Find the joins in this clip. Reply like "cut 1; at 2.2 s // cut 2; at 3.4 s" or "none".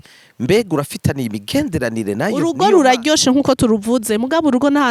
cut 1; at 2.4 s